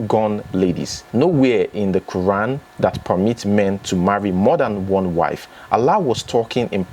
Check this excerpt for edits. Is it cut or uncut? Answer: uncut